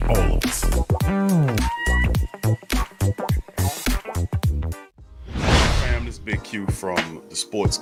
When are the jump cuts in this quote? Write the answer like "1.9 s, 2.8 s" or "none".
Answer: none